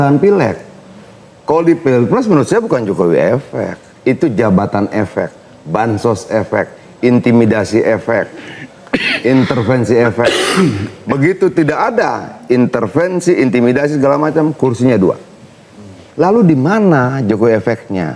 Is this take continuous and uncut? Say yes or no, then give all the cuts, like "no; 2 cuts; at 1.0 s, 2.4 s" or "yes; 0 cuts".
yes; 0 cuts